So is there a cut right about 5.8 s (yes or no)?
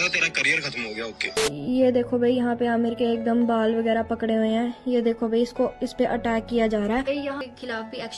no